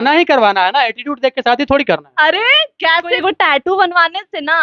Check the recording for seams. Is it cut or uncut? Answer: cut